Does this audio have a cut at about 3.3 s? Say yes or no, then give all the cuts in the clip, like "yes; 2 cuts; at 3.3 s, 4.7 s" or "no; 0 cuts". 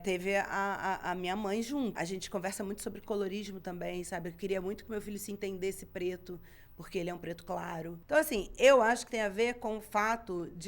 no; 2 cuts; at 1.9 s, 7.9 s